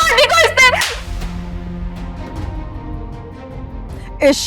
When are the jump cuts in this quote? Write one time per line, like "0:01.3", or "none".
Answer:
0:02.2